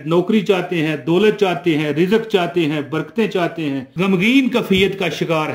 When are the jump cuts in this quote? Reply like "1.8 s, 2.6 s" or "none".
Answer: 3.9 s